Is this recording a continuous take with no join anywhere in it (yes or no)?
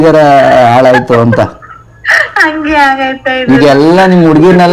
yes